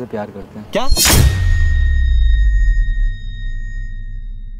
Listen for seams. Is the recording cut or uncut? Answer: uncut